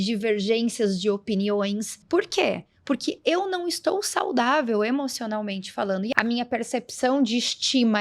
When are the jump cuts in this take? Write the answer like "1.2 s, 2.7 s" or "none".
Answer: 1.9 s, 6.1 s